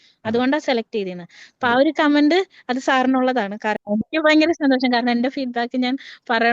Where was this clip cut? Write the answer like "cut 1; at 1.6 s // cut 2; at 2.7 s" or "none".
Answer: cut 1; at 3.7 s